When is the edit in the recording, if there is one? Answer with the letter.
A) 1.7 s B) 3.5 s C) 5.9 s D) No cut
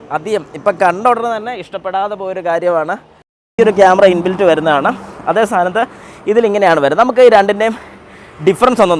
B